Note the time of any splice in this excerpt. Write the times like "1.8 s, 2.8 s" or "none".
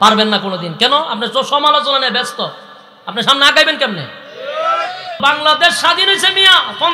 5.2 s